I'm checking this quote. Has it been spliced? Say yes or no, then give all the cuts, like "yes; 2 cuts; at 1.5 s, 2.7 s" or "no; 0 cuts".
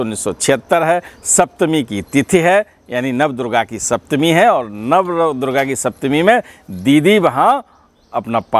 no; 0 cuts